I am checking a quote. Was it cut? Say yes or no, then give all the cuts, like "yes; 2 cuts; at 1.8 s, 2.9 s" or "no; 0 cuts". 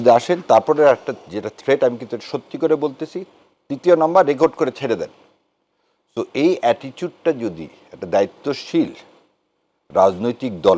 no; 0 cuts